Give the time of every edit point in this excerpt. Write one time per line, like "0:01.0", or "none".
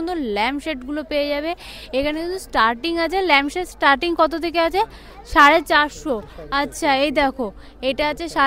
none